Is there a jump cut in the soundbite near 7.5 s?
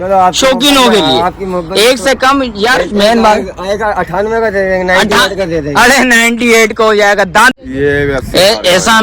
yes; 1 cut; at 7.5 s

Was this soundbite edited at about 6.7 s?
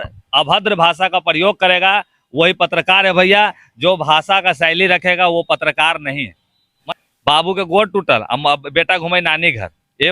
yes; 1 cut; at 6.7 s

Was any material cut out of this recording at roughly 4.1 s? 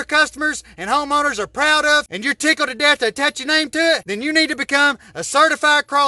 yes; 2 cuts; at 2.1 s, 4.1 s

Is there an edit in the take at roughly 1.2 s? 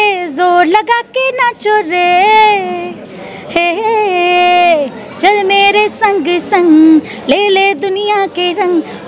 no; 0 cuts

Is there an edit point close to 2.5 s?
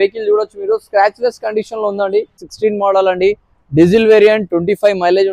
yes; 1 cut; at 2.5 s

